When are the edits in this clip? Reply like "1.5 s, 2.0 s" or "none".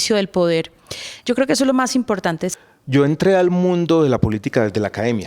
2.5 s